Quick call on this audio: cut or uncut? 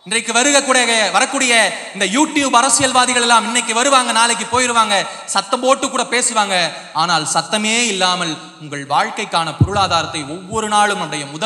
uncut